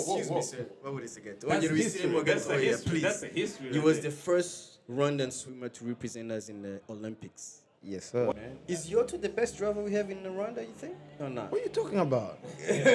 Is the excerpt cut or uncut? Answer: cut